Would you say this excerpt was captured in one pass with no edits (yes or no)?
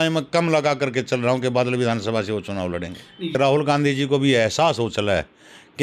no